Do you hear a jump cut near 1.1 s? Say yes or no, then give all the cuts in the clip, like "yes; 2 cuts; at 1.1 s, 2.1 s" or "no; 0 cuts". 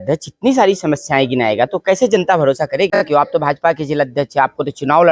no; 1 cut; at 3.0 s